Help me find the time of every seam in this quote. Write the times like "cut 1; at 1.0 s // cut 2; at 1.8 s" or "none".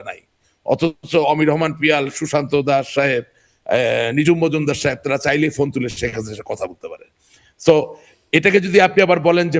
none